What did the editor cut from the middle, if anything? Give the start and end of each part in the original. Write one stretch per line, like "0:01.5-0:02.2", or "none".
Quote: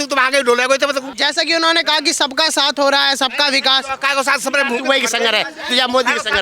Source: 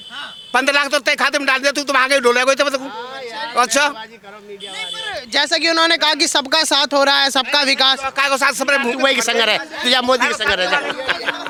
0:02.9-0:05.3